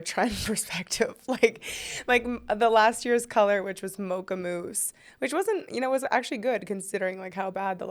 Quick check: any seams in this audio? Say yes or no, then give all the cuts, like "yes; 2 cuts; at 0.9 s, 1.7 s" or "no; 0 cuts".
no; 0 cuts